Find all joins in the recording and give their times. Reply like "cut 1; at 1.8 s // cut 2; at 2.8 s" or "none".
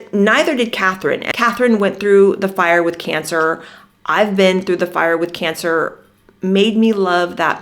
cut 1; at 1.2 s